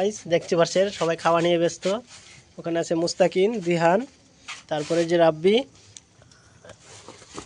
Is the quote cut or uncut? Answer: uncut